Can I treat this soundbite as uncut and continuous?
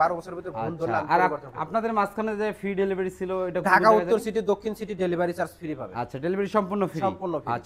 yes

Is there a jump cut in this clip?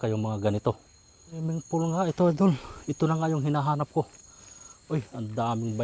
yes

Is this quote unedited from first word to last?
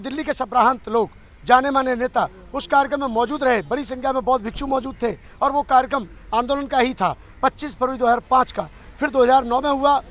yes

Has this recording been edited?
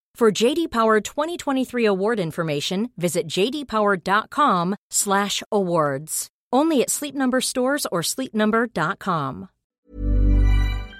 yes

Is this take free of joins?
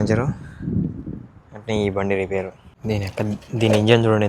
no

